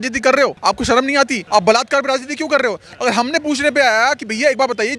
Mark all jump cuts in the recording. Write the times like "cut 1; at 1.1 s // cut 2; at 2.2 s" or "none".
none